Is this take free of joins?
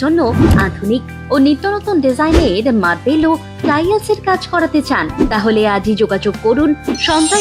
yes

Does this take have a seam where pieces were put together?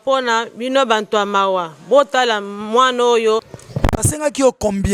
yes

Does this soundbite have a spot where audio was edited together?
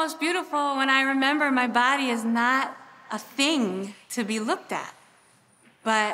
no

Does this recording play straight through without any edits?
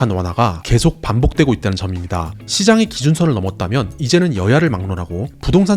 yes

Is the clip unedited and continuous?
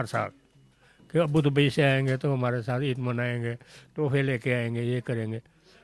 yes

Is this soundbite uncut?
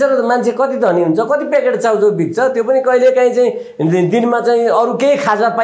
yes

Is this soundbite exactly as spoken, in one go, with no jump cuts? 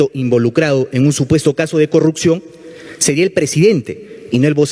yes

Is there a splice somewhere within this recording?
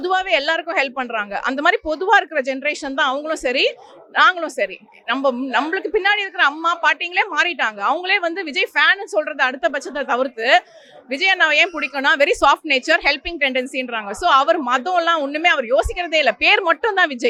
no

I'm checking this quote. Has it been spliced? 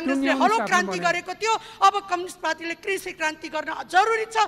no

